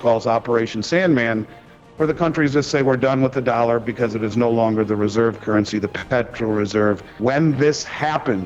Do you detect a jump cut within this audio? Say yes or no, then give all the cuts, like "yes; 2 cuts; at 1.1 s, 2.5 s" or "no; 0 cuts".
yes; 2 cuts; at 6.0 s, 7.1 s